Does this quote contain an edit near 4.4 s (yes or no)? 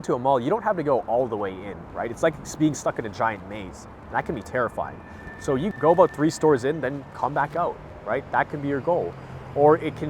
no